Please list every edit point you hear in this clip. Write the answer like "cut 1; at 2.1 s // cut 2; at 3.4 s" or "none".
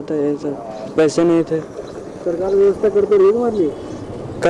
none